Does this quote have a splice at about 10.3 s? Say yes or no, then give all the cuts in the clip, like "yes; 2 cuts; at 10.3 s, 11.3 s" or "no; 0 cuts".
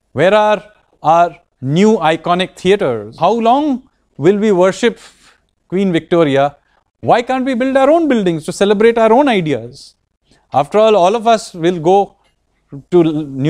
no; 1 cut; at 3.2 s